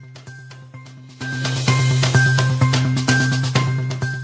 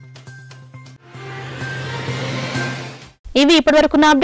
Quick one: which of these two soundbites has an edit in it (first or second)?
first